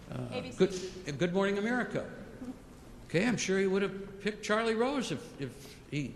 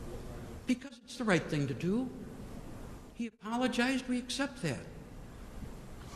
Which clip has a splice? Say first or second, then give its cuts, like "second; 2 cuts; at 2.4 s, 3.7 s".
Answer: second; 1 cut; at 4.0 s